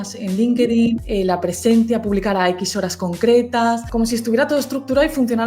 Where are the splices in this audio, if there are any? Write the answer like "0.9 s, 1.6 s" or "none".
1.0 s, 3.9 s

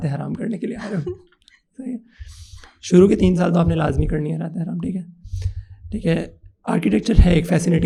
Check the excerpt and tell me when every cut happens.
none

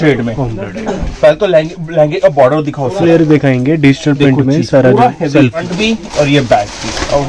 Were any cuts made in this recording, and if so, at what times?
5.7 s

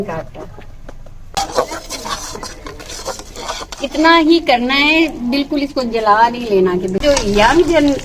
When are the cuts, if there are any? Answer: 1.3 s, 7.0 s

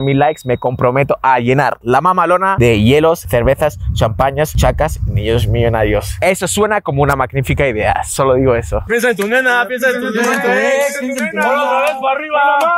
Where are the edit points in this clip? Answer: 8.8 s

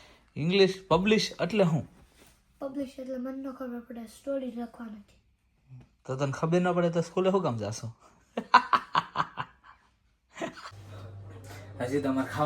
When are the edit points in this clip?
10.6 s

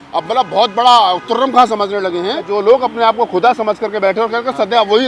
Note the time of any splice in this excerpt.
2.5 s

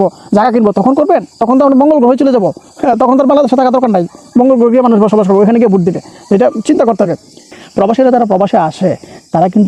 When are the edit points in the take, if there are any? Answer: 7.5 s

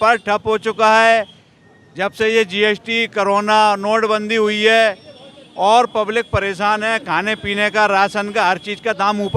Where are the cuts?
none

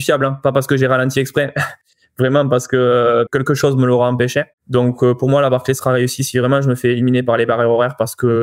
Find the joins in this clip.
3.3 s, 4.6 s

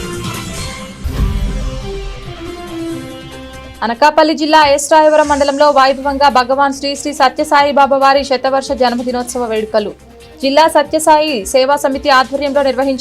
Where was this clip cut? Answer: 1.0 s, 3.7 s

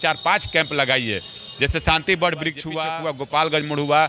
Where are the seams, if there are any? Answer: 2.7 s

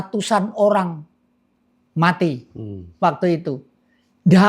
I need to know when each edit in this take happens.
none

